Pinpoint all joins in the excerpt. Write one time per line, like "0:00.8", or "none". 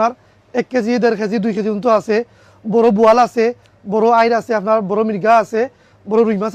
none

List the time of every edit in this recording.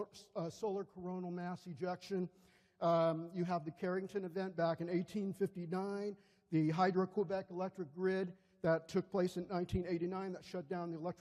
none

